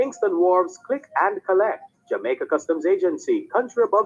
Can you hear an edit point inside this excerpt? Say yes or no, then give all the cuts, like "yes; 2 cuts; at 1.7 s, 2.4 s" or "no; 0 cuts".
no; 0 cuts